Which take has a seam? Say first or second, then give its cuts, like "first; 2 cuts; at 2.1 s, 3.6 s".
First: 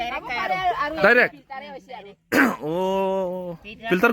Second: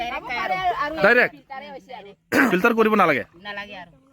second; 1 cut; at 2.5 s